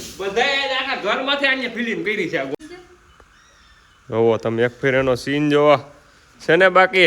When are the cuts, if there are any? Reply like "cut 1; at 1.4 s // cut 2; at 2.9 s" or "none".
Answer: cut 1; at 2.5 s